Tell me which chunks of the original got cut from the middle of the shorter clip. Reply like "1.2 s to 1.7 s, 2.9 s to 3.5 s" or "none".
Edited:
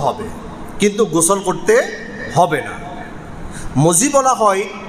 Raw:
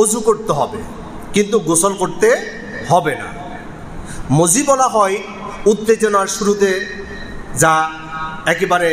none